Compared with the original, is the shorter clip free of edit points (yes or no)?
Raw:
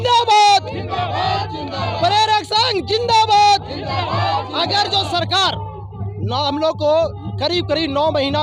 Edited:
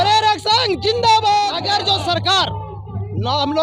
no